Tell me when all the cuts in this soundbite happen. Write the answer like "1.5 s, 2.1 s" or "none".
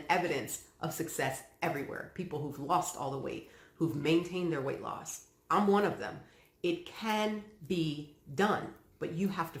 none